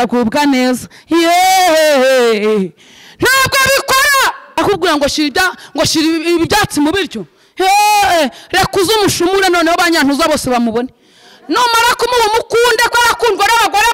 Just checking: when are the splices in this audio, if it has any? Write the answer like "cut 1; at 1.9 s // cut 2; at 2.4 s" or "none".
cut 1; at 4.6 s